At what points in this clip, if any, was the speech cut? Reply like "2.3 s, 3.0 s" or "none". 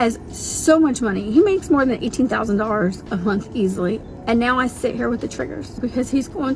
4.0 s, 5.8 s

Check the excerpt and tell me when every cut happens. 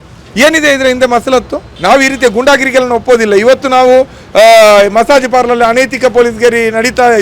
1.8 s

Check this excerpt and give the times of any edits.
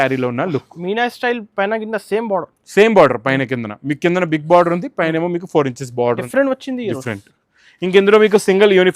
6.2 s

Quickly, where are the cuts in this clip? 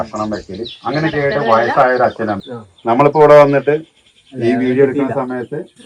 2.4 s

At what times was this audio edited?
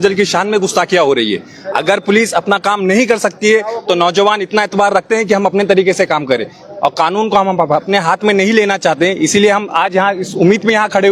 none

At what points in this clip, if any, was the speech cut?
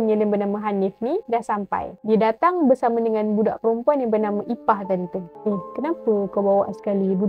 1.9 s, 5.2 s

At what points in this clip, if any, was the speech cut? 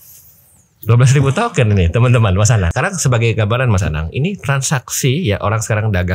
2.7 s

